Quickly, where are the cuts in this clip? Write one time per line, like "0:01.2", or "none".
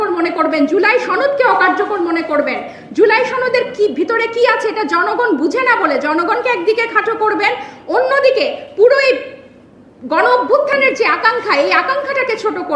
none